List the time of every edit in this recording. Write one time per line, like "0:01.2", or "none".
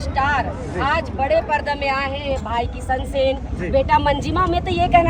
none